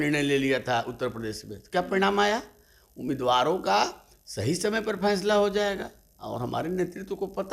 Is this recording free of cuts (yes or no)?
yes